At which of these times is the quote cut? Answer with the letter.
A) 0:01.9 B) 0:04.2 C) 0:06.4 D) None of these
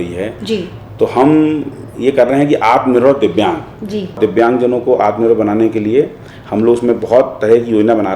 B